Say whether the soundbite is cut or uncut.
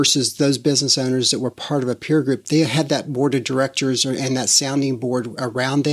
uncut